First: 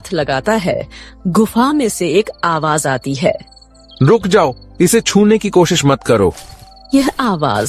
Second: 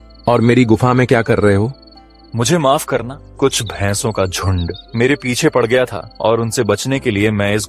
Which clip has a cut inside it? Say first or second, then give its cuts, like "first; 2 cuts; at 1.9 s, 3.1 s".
second; 3 cuts; at 3.2 s, 4.8 s, 6.0 s